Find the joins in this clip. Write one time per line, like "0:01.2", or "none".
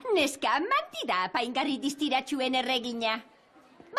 0:01.7

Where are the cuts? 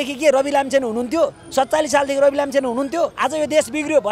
0:03.1

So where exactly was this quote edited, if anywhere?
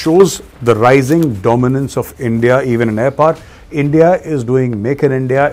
none

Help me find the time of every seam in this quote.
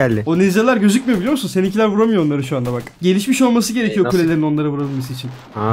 none

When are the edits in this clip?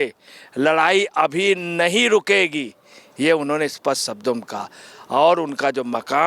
none

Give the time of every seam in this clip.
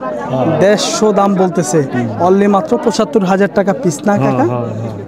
none

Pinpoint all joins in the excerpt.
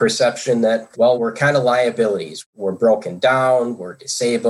0:01.1
0:02.4

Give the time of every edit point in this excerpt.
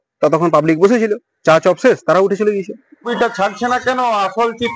0:03.1

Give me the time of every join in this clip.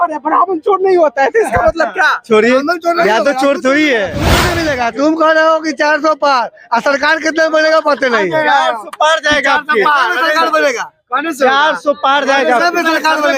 0:04.4

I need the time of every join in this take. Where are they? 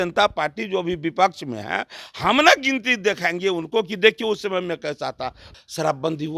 0:05.4

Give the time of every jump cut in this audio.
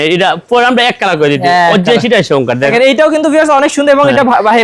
0:02.6

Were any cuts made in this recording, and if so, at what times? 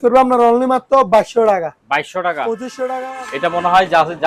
0:02.8

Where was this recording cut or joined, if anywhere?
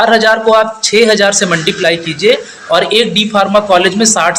none

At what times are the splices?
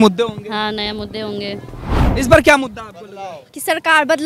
0:02.0

